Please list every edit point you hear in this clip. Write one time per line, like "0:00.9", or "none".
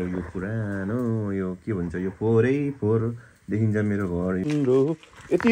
0:04.4